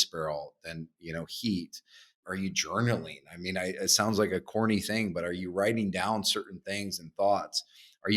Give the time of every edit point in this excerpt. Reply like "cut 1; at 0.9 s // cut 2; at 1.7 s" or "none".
cut 1; at 2.2 s